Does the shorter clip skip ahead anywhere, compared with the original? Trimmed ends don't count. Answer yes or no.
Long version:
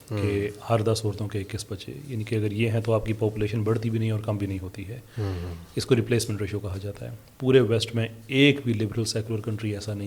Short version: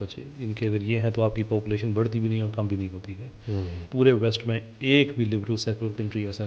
yes